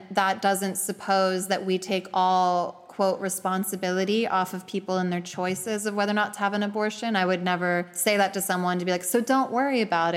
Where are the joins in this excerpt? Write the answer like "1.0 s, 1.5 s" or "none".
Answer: 7.9 s